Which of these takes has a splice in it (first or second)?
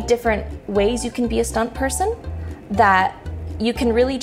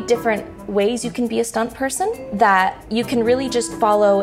second